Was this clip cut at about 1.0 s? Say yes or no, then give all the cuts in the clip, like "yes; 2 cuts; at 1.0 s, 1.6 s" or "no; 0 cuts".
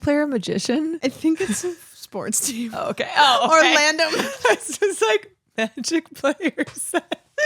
yes; 1 cut; at 1.0 s